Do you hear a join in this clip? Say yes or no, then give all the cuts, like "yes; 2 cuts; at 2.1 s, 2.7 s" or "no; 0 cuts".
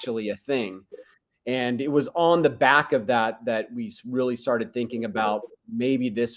no; 0 cuts